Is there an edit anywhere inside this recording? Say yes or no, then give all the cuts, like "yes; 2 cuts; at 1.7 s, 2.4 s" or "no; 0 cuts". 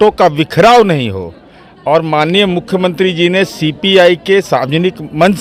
no; 0 cuts